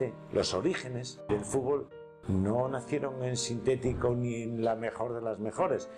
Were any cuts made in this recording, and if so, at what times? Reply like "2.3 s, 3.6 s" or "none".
1.3 s